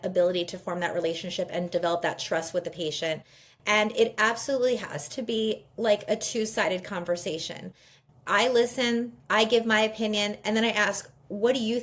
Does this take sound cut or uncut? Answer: uncut